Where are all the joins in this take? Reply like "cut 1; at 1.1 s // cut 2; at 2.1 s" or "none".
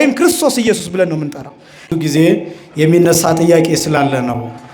cut 1; at 1.8 s